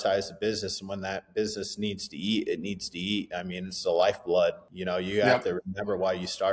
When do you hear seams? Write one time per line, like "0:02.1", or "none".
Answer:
0:04.7